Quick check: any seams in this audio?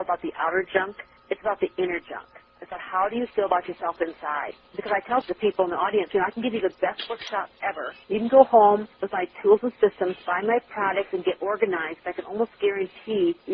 no; 0 cuts

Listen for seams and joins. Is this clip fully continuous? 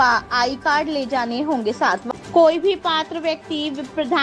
no; 1 cut; at 2.0 s

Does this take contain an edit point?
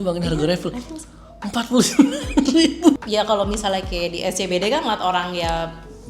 yes; 1 cut; at 3.0 s

